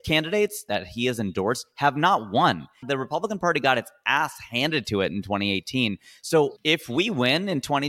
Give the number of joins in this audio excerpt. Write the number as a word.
two